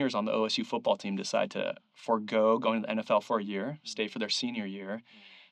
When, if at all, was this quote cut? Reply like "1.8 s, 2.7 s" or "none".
none